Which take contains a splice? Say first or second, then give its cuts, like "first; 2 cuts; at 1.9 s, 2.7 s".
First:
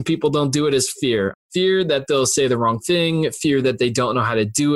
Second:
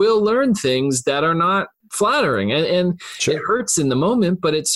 first; 1 cut; at 1.4 s